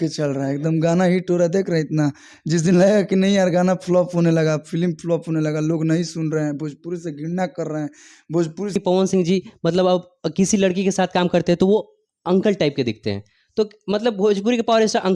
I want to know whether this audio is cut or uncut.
cut